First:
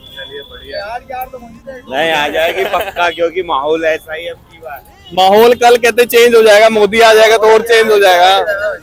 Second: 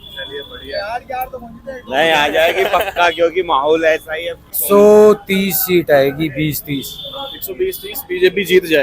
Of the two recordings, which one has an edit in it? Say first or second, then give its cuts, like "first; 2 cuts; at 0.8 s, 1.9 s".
second; 1 cut; at 4.6 s